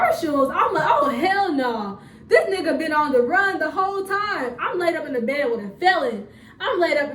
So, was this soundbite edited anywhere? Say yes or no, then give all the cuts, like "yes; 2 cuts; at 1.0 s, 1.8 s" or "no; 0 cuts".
no; 0 cuts